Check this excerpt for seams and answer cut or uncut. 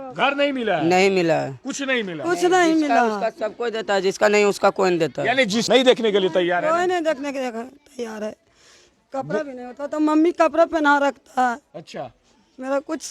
cut